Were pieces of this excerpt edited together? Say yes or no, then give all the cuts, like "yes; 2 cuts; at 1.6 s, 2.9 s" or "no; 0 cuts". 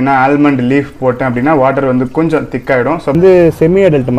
yes; 1 cut; at 3.1 s